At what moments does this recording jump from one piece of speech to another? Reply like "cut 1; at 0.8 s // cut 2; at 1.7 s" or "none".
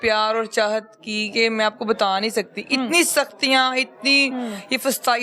none